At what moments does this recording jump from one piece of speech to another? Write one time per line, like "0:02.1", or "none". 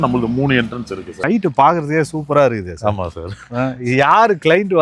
0:01.1